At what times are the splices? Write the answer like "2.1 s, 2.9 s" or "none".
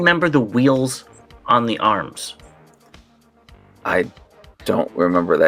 none